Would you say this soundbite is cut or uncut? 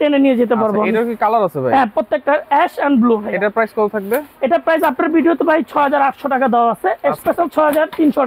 uncut